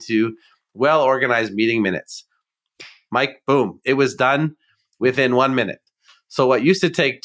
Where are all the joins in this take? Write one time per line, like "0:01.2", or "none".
none